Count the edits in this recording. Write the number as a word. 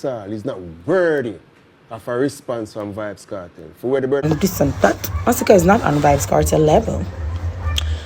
one